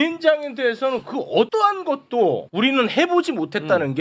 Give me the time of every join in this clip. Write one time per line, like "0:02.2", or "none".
0:01.5
0:02.5